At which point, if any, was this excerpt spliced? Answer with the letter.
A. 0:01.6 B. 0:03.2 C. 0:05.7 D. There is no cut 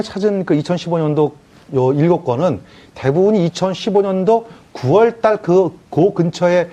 B